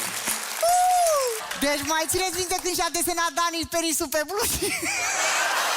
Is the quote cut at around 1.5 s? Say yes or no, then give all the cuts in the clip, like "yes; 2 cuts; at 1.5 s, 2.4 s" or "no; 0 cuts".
yes; 1 cut; at 1.5 s